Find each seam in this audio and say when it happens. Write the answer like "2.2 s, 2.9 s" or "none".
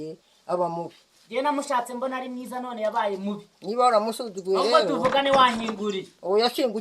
none